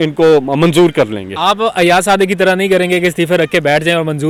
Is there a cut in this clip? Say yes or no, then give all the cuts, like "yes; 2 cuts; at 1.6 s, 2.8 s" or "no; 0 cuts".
no; 0 cuts